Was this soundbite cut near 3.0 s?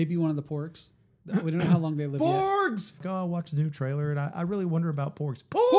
yes; 1 cut; at 3.0 s

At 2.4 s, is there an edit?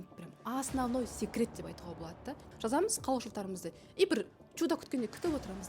yes; 1 cut; at 2.4 s

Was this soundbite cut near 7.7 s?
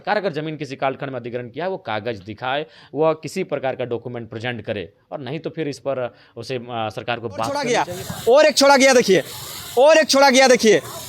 yes; 1 cut; at 7.7 s

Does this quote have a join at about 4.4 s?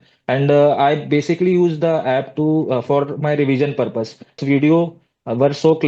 yes; 1 cut; at 4.4 s

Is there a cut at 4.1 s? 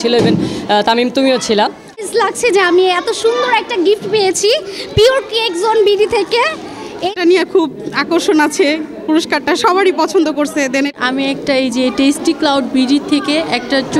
no; 3 cuts; at 2.1 s, 7.1 s, 10.9 s

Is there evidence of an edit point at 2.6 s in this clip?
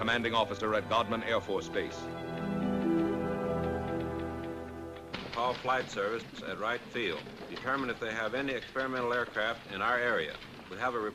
no; 0 cuts

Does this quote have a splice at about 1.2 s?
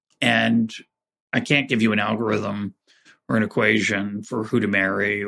yes; 1 cut; at 1.2 s

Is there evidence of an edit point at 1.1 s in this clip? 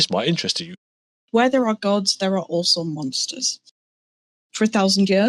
yes; 1 cut; at 1.1 s

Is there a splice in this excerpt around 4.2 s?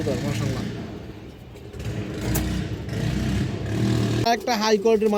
no; 0 cuts

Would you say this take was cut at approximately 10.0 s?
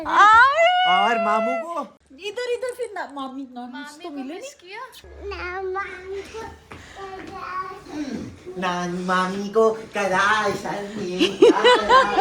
no; 2 cuts; at 2.0 s, 5.0 s

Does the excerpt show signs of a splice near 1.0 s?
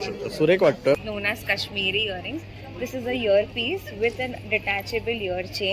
yes; 1 cut; at 1.0 s

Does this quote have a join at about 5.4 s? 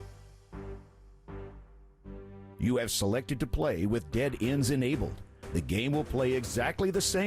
no; 1 cut; at 2.5 s

